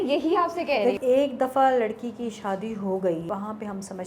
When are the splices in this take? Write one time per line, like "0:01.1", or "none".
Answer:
0:01.0
0:03.2